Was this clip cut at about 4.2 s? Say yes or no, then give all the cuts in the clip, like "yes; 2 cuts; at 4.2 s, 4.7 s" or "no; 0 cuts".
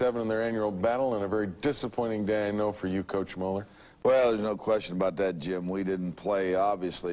no; 1 cut; at 6.1 s